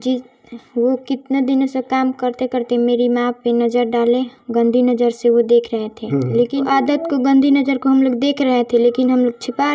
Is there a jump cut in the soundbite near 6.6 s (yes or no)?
yes